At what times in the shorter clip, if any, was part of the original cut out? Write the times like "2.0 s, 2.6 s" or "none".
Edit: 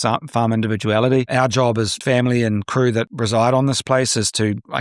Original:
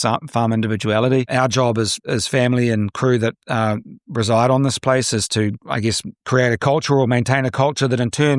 2.0 s, 3.1 s